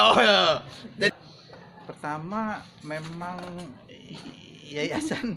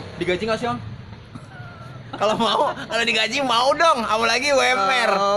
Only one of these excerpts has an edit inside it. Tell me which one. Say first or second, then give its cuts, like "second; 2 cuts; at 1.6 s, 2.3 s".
first; 1 cut; at 1.1 s